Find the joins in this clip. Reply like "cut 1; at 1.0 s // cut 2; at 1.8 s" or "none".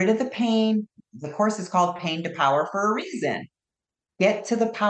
none